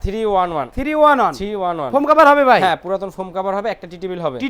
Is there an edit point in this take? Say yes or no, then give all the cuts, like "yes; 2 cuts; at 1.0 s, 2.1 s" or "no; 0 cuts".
no; 0 cuts